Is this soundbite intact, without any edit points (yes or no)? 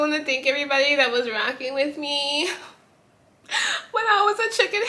yes